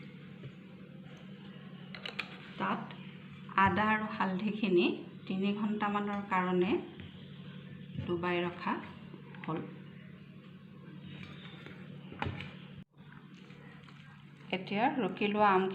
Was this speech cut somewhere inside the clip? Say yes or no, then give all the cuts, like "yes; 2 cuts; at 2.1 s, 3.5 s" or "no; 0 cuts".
yes; 1 cut; at 12.9 s